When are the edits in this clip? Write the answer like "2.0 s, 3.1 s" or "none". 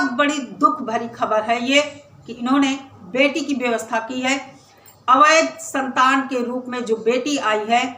2.4 s